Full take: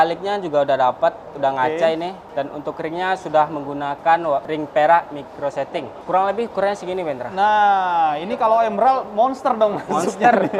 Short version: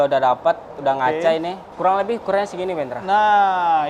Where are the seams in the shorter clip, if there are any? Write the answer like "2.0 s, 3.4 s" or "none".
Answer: 1.7 s